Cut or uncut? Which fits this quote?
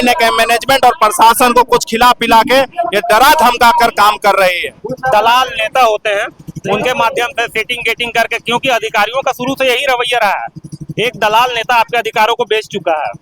cut